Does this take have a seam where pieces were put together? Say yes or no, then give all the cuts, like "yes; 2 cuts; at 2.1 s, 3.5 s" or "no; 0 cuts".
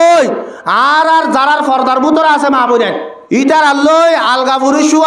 yes; 1 cut; at 3.1 s